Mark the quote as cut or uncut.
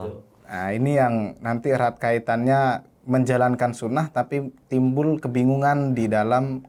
uncut